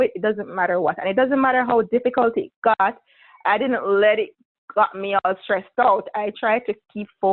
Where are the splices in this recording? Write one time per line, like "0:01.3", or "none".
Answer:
none